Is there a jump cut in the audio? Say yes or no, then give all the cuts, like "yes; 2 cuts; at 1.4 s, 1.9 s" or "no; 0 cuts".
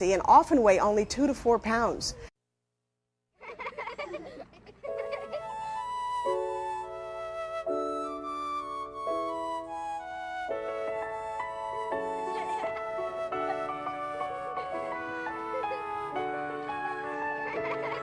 no; 0 cuts